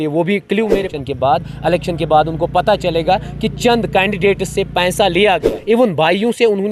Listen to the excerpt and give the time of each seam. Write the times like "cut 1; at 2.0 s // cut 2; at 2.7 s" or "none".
cut 1; at 0.9 s // cut 2; at 5.5 s